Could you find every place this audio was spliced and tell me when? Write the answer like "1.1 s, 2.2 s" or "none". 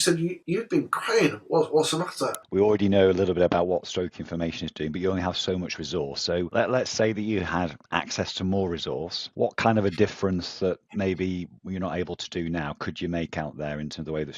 2.4 s